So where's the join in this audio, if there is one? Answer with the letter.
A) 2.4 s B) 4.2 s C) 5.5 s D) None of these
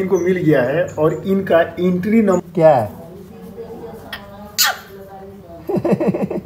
A